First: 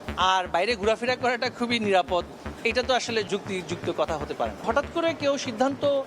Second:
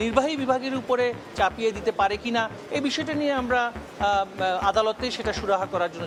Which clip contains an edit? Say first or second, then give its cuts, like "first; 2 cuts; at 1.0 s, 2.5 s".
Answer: first; 2 cuts; at 3.3 s, 4.6 s